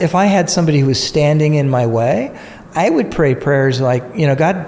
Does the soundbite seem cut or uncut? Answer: uncut